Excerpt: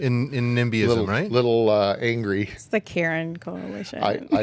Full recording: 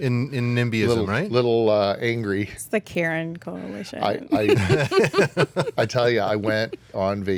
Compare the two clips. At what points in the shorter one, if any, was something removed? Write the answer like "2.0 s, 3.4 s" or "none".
none